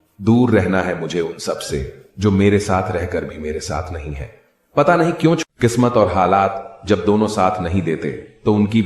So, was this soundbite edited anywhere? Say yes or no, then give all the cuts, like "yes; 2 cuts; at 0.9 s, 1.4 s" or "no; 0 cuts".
yes; 1 cut; at 5.4 s